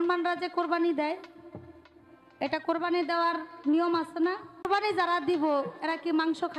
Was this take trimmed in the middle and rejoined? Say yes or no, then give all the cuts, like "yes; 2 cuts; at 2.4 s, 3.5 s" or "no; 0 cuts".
yes; 1 cut; at 4.7 s